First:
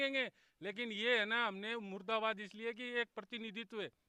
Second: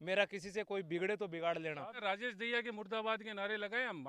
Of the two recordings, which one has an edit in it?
second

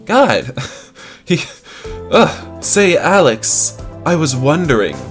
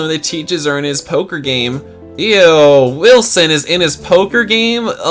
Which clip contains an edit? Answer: first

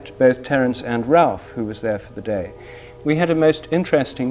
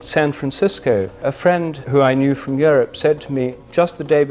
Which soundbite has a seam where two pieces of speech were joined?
second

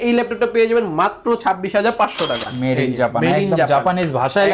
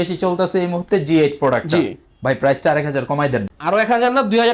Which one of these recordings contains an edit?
first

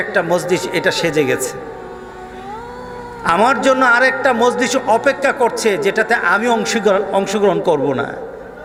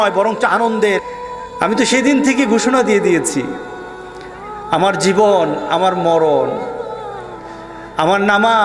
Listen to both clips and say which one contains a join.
second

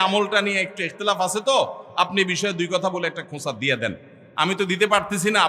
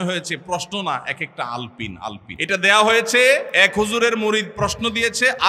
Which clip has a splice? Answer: second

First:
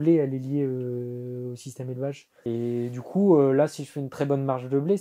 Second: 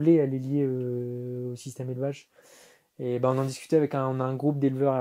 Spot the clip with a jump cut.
first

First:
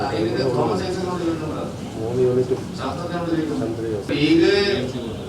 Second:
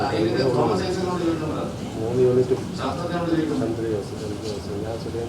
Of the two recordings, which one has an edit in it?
first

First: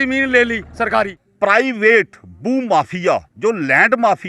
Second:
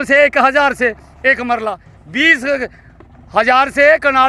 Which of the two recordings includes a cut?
first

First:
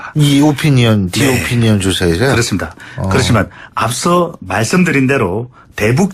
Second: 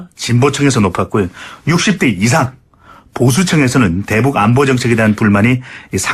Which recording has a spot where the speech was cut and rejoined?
second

